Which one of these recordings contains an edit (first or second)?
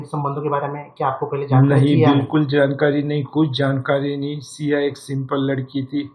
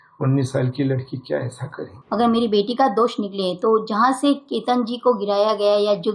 second